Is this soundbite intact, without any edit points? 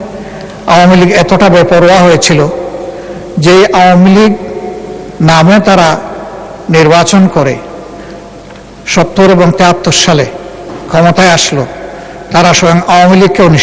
yes; 0 cuts

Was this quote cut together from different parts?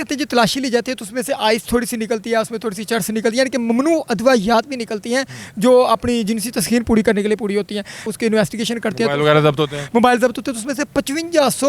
yes; 1 cut; at 8.0 s

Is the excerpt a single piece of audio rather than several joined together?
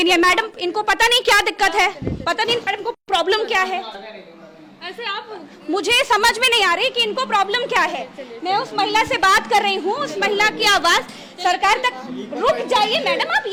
yes; 0 cuts

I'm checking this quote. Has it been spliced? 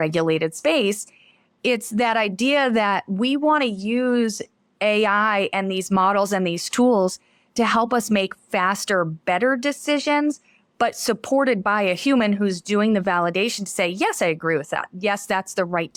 no; 0 cuts

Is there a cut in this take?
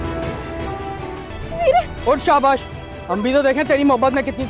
no; 0 cuts

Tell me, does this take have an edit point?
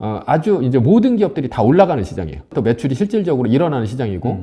yes; 1 cut; at 2.5 s

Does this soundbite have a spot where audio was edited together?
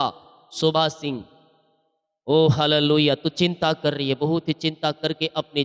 no; 0 cuts

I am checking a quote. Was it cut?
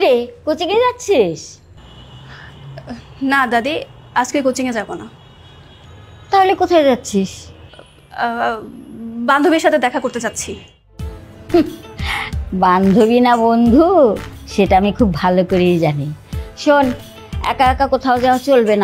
no; 0 cuts

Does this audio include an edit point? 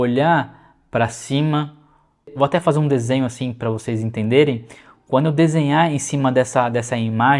yes; 1 cut; at 2.3 s

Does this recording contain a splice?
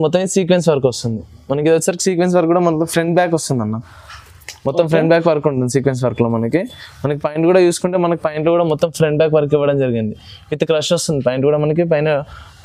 no; 0 cuts

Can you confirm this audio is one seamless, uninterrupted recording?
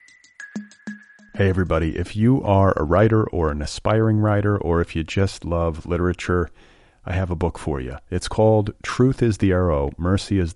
no; 1 cut; at 0.9 s

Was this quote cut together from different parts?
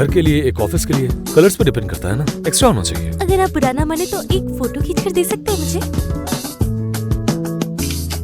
yes; 1 cut; at 6.4 s

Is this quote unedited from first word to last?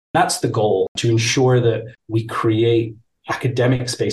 no; 2 cuts; at 0.9 s, 1.9 s

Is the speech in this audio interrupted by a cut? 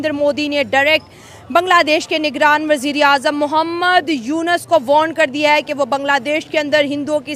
no; 0 cuts

